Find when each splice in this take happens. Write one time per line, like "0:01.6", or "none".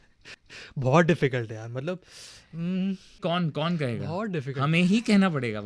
none